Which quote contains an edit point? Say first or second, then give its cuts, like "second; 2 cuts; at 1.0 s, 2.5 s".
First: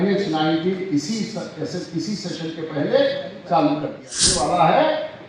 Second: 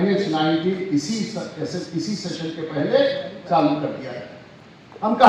first; 1 cut; at 4.3 s